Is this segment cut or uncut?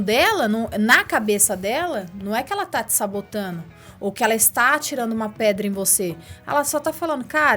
uncut